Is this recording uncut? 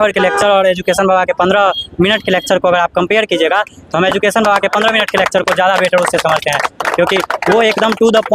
yes; 0 cuts

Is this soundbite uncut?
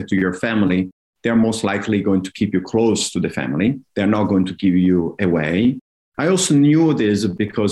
yes; 0 cuts

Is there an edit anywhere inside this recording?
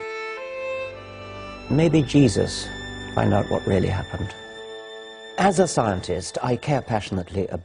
yes; 1 cut; at 5.2 s

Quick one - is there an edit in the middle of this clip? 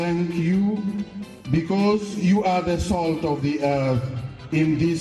no; 0 cuts

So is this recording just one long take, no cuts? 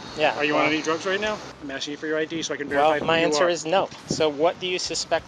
no; 2 cuts; at 1.5 s, 4.0 s

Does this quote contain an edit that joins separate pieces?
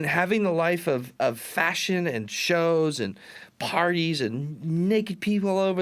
no; 0 cuts

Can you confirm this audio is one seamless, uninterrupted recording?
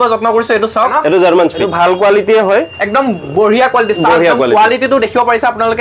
no; 2 cuts; at 0.9 s, 1.6 s

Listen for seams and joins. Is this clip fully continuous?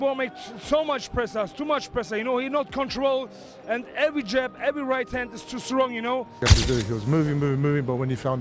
no; 1 cut; at 6.4 s

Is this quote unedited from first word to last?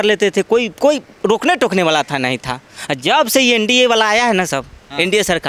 yes; 0 cuts

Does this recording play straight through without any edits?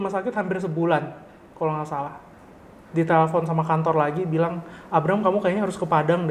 yes; 0 cuts

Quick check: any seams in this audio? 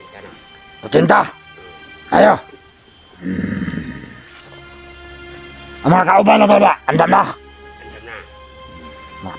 no; 0 cuts

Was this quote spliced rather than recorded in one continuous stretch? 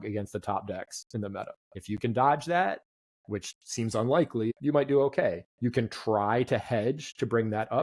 yes; 3 cuts; at 1.7 s, 4.5 s, 5.5 s

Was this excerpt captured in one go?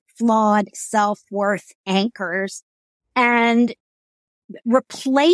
yes; 0 cuts

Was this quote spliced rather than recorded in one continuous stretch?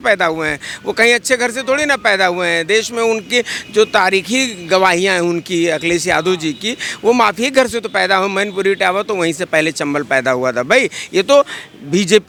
no; 0 cuts

